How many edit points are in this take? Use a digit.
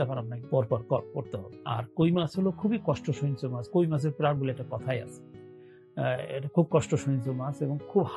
1